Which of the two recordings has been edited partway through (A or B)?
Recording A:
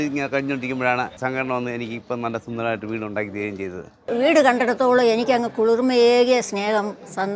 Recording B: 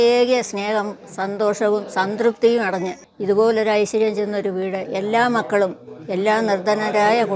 A